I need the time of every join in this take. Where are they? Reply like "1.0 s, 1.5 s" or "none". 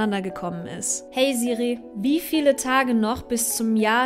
1.0 s